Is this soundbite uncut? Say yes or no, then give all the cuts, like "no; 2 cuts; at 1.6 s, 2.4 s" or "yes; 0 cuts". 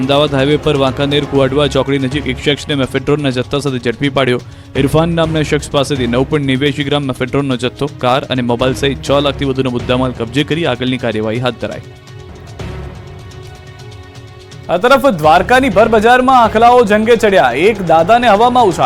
yes; 0 cuts